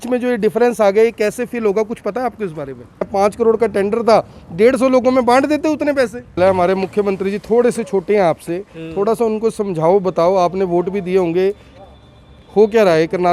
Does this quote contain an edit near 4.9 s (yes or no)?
no